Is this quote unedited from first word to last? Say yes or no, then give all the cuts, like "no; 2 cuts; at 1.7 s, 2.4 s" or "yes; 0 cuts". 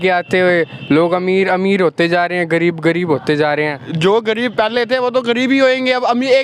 yes; 0 cuts